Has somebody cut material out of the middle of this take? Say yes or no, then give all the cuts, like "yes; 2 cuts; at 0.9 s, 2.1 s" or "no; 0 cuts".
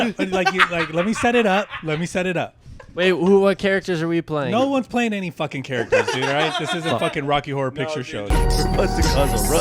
yes; 1 cut; at 8.2 s